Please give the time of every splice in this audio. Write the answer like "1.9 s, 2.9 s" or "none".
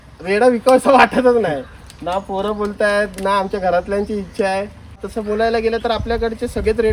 5.1 s